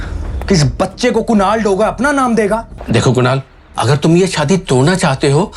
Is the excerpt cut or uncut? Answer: cut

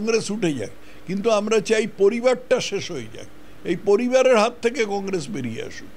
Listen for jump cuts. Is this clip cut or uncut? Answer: uncut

